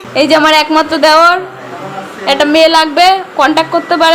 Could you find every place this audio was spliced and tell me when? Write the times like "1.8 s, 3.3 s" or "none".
none